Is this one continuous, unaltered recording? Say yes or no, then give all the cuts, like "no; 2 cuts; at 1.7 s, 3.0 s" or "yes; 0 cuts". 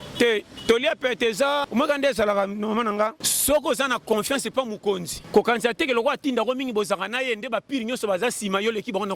no; 3 cuts; at 1.7 s, 3.3 s, 5.1 s